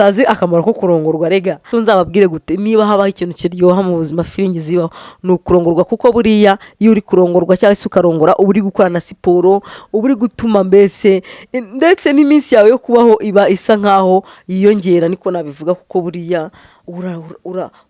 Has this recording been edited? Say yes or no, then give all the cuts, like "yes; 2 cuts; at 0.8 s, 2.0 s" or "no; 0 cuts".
yes; 1 cut; at 1.6 s